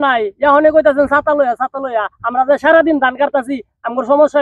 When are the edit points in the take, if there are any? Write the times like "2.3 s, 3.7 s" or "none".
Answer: none

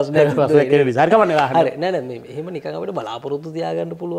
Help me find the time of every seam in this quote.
none

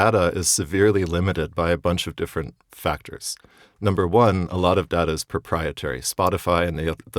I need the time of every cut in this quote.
none

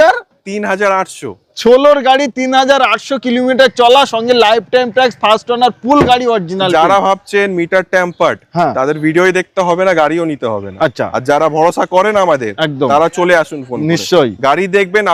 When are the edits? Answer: none

